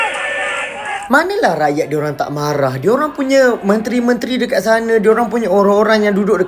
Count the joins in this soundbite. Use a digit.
1